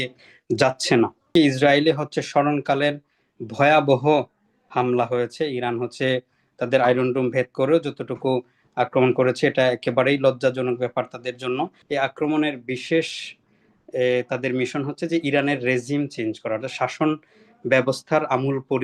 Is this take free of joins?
no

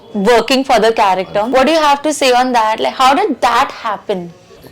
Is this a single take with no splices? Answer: no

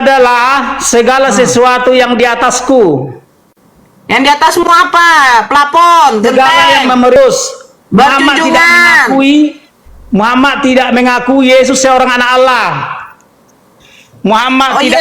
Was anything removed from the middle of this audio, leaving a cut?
yes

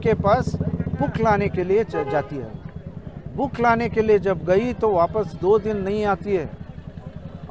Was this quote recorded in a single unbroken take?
yes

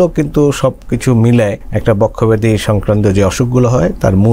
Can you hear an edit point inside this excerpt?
yes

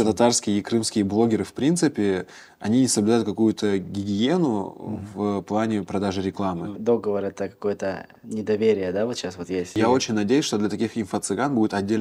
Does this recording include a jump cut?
yes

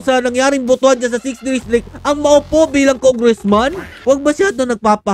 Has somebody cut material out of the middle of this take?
yes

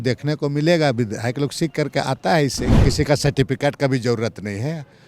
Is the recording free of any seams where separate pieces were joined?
no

